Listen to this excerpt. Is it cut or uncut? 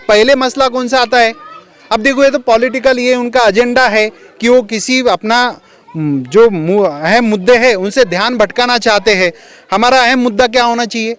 uncut